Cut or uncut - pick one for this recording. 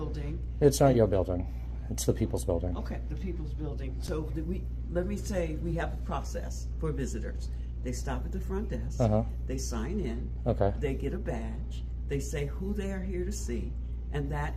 uncut